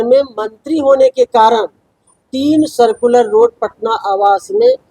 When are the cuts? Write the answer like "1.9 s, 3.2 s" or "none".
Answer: none